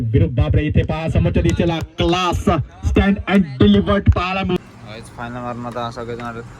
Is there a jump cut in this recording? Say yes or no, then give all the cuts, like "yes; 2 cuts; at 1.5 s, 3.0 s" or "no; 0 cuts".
yes; 1 cut; at 4.6 s